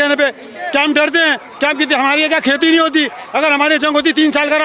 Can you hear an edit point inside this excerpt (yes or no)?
no